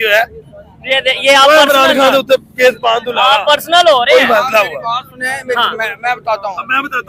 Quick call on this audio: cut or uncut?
uncut